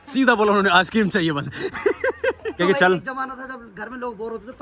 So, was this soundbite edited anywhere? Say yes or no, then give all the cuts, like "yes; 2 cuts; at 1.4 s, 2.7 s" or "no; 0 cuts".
yes; 1 cut; at 2.6 s